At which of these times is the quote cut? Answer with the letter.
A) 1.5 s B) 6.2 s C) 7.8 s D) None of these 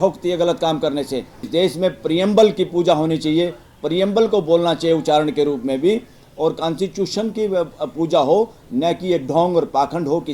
A